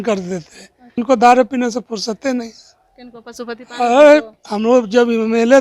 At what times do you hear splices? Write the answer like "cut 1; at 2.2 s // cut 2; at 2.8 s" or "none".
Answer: cut 1; at 1.0 s